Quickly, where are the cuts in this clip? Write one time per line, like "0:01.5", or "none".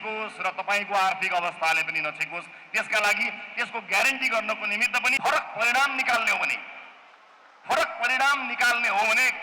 0:05.1

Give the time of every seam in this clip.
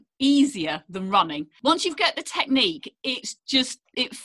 0:01.4

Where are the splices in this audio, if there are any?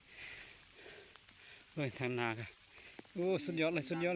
none

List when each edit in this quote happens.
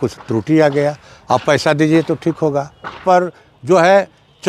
0:03.0

